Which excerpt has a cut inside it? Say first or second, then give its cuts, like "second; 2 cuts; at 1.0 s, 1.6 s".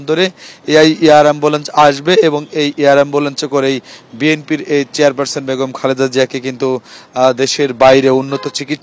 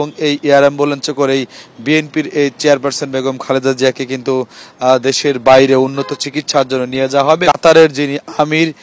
second; 1 cut; at 7.4 s